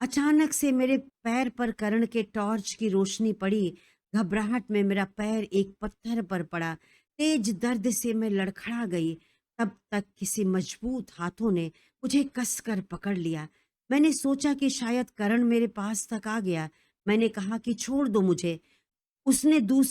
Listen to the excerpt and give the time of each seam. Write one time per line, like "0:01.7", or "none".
0:01.1